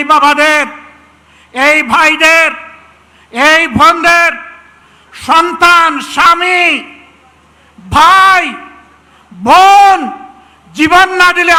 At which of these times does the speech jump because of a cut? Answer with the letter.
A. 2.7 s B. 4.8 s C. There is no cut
C